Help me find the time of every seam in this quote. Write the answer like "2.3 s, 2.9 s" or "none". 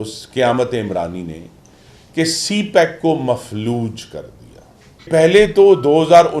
5.1 s